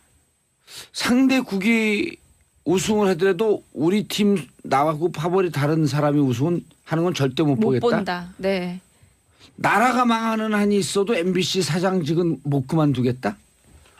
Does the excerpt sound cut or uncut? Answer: cut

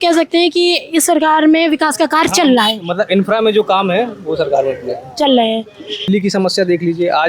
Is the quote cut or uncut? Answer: cut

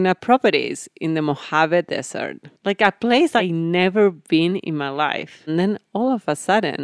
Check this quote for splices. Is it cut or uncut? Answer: cut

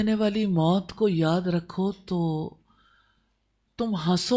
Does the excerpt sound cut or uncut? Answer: uncut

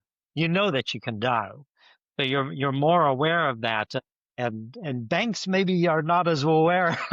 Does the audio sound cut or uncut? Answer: uncut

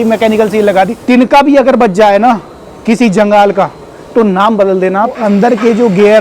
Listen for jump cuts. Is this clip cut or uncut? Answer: cut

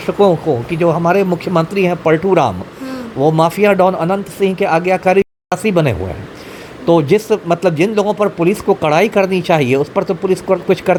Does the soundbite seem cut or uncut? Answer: uncut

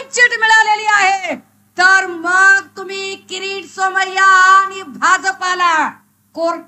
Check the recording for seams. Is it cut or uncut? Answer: uncut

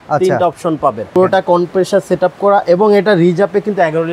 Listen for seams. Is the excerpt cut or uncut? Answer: cut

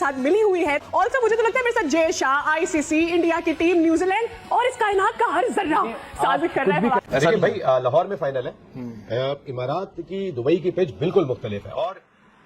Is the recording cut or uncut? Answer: cut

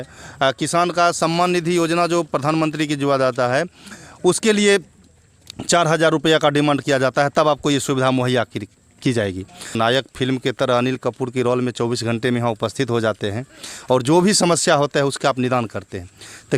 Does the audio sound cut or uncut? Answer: cut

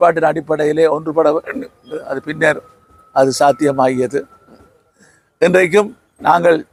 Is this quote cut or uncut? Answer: uncut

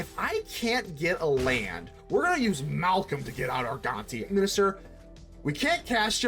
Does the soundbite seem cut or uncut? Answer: cut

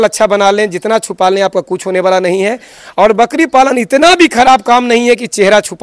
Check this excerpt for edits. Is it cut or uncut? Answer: uncut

